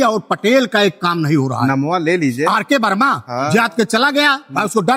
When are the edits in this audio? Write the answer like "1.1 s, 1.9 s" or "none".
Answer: none

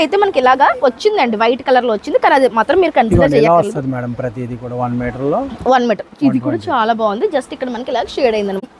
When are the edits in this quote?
none

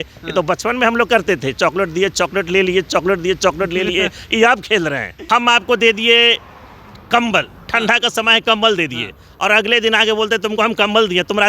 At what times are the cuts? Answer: 5.2 s

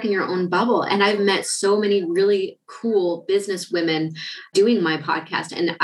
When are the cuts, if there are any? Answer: 4.5 s

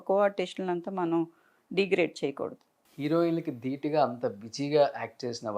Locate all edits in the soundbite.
2.8 s

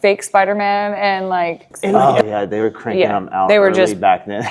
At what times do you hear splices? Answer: 1.9 s

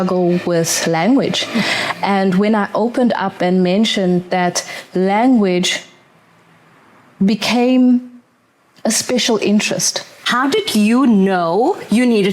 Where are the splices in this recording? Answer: 10.2 s

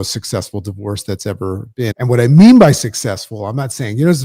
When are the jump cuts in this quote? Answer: 1.9 s

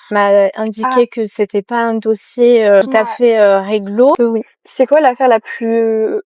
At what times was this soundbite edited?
4.2 s

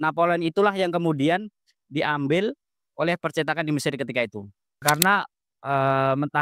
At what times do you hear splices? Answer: 4.8 s

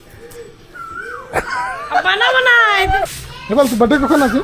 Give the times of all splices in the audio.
3.2 s

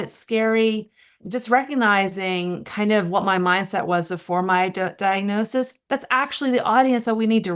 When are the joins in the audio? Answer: 1.2 s

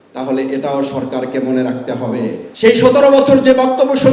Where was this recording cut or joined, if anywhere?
2.4 s

